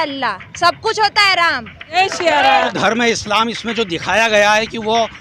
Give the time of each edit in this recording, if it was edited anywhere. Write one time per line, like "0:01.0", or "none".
0:01.9
0:02.7